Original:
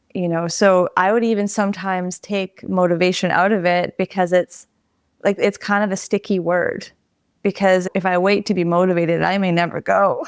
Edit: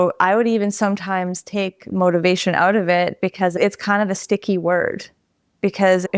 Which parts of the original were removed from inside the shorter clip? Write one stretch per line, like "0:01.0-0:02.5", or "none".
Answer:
0:04.3-0:05.4